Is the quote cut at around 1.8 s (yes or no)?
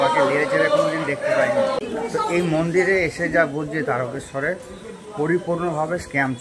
yes